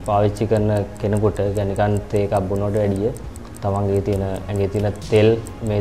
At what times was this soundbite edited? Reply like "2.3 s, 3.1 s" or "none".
none